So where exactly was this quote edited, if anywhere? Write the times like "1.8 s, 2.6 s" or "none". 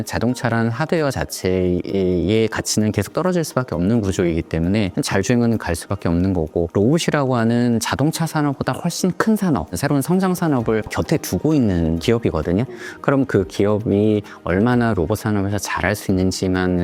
none